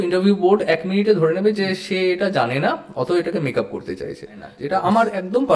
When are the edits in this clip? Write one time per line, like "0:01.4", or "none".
0:04.5